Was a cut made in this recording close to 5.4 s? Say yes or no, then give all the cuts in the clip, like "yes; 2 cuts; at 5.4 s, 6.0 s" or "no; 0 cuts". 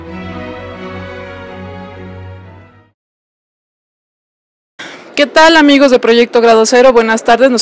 no; 1 cut; at 0.9 s